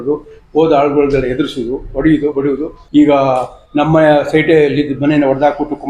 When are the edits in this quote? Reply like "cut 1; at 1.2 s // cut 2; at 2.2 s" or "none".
cut 1; at 2.7 s